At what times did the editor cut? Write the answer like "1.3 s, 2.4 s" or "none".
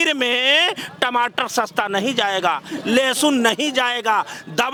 none